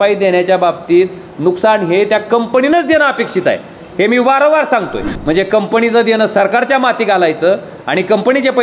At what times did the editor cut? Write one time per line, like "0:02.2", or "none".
0:05.1